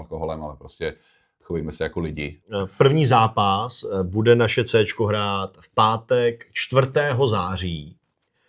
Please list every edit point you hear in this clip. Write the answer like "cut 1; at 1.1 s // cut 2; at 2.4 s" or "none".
cut 1; at 2.4 s